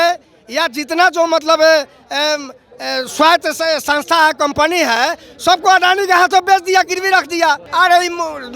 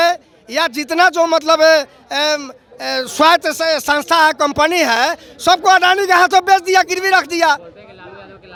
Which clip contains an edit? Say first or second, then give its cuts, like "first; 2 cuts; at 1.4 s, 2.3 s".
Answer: first; 1 cut; at 7.6 s